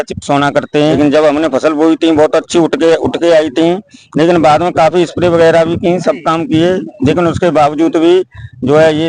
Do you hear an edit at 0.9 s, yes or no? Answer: yes